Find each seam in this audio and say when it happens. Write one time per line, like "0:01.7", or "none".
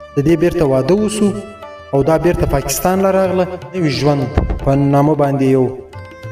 0:03.8